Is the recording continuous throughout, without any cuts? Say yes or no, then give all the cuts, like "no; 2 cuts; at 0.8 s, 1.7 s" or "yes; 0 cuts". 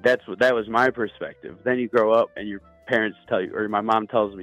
yes; 0 cuts